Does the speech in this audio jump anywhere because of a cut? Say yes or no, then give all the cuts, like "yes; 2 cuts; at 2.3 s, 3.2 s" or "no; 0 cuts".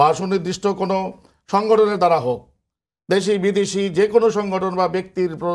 no; 0 cuts